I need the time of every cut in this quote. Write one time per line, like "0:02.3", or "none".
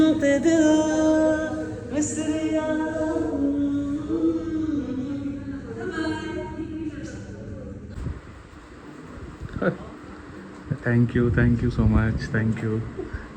0:08.0